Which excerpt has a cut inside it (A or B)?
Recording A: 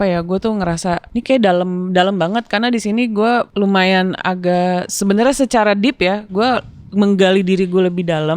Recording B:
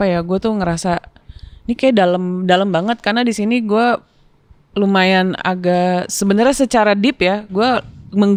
A